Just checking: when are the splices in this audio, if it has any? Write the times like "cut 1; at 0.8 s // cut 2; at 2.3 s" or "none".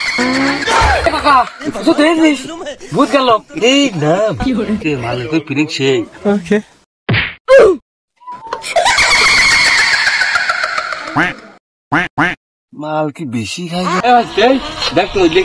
cut 1; at 14.0 s